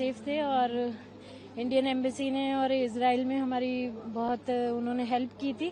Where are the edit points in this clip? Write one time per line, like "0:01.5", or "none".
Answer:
none